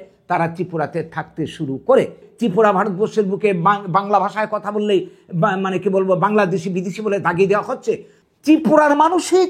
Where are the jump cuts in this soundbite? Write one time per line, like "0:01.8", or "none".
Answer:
0:02.2
0:08.1